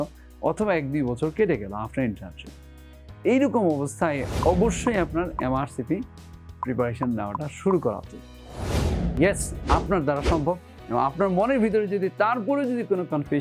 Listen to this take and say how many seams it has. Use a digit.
1